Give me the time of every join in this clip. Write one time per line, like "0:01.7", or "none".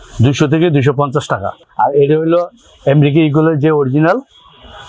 0:01.5